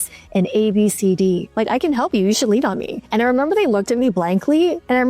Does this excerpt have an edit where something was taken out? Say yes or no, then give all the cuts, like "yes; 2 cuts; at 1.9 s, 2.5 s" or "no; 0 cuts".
yes; 1 cut; at 1.5 s